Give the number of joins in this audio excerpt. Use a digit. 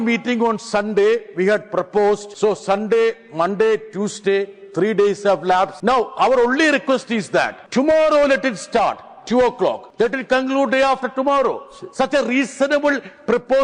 4